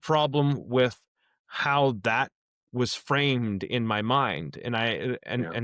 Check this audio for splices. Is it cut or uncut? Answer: uncut